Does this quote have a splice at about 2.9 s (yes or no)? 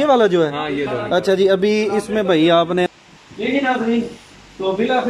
yes